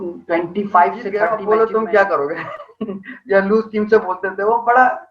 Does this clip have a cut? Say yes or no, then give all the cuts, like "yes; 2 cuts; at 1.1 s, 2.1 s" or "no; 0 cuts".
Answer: yes; 1 cut; at 1.3 s